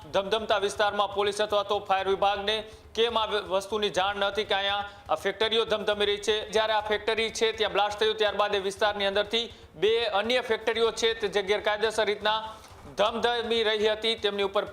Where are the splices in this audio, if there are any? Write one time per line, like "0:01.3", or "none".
0:06.5